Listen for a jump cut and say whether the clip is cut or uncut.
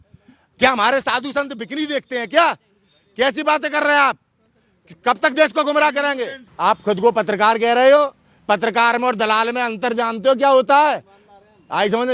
cut